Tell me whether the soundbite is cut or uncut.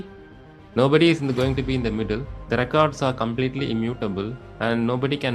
uncut